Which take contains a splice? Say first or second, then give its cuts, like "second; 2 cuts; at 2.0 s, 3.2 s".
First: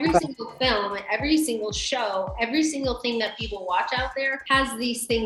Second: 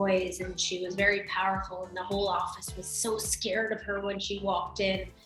first; 1 cut; at 4.4 s